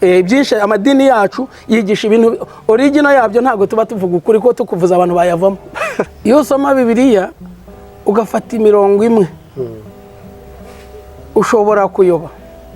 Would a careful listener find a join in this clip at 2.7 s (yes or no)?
no